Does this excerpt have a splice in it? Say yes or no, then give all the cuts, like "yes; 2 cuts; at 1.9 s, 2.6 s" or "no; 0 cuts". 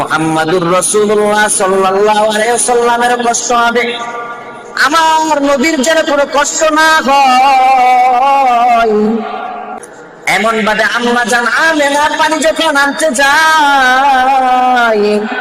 yes; 1 cut; at 9.6 s